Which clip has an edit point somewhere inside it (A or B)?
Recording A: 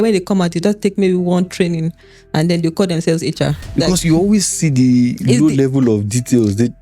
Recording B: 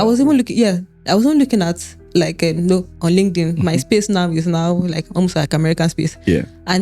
A